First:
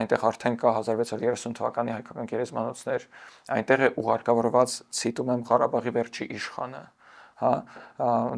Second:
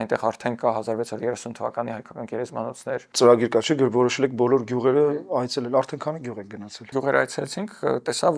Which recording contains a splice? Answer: second; 2 cuts; at 3.0 s, 6.9 s

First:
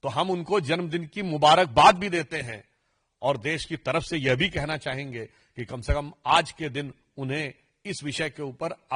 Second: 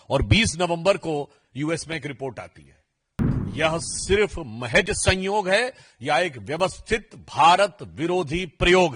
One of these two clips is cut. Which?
second; 1 cut; at 3.2 s

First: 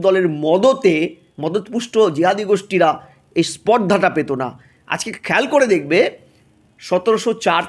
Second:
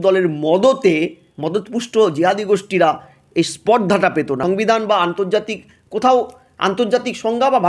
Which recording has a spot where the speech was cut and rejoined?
second; 1 cut; at 4.4 s

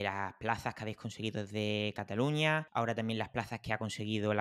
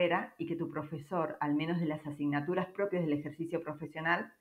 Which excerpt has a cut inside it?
first; 1 cut; at 2.7 s

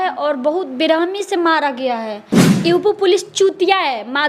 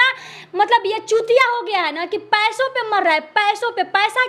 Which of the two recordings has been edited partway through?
first; 1 cut; at 2.5 s

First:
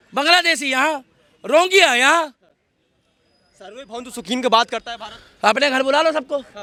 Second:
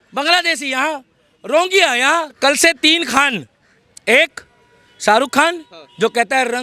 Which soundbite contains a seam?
second; 1 cut; at 2.4 s

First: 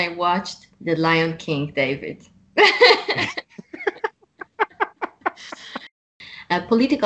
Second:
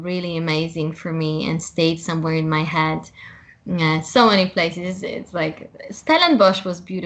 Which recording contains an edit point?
first; 1 cut; at 6.1 s

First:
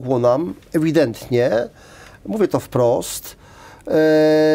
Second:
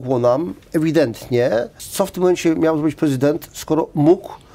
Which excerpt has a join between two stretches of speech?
second; 1 cut; at 1.8 s

